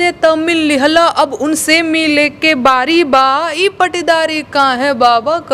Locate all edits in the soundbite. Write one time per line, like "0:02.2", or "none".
none